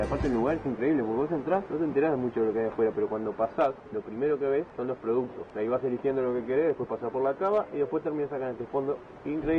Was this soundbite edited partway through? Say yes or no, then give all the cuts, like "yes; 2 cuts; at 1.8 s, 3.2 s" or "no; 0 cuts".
yes; 4 cuts; at 1.7 s, 3.9 s, 4.7 s, 5.4 s